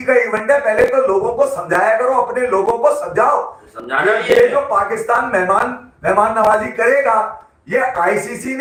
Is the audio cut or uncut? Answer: uncut